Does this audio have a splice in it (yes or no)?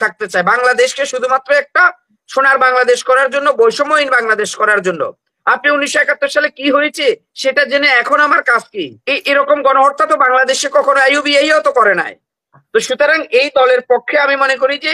yes